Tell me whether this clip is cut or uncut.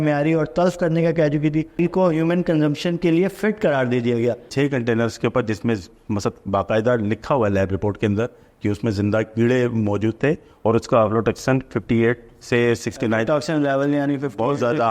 cut